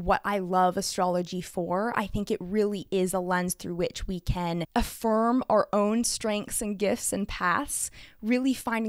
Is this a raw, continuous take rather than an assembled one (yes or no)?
no